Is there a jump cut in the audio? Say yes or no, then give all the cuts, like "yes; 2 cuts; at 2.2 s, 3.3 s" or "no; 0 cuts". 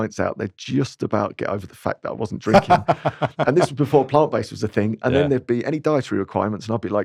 no; 0 cuts